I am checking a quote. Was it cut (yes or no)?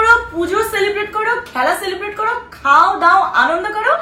no